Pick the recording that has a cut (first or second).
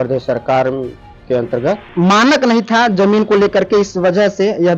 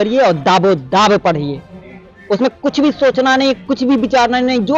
first